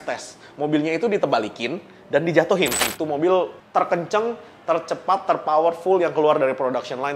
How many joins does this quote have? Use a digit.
1